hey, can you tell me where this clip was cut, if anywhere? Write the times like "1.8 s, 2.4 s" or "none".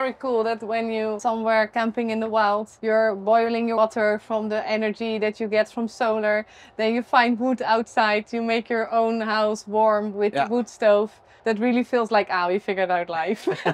1.2 s, 2.7 s, 3.8 s, 11.2 s